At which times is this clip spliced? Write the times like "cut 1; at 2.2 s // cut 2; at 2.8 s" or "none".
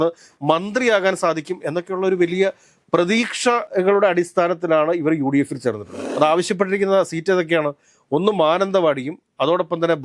cut 1; at 3.7 s // cut 2; at 6.1 s